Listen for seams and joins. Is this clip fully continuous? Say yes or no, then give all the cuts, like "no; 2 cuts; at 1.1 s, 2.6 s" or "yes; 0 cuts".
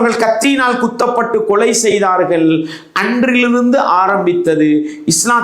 yes; 0 cuts